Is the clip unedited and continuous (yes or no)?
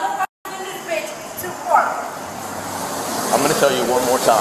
yes